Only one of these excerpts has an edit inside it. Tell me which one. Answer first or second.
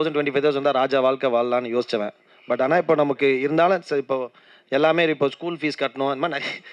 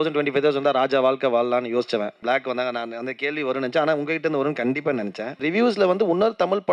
second